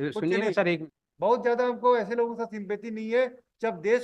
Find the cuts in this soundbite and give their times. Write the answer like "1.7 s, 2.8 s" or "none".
1.0 s